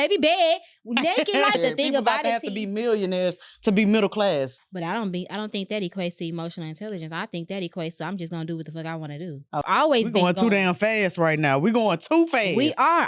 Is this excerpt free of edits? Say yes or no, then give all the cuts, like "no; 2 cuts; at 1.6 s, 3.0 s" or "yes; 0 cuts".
no; 3 cuts; at 1.6 s, 4.5 s, 9.6 s